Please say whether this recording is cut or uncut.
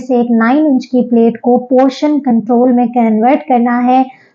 uncut